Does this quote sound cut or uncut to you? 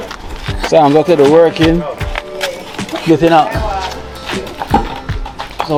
uncut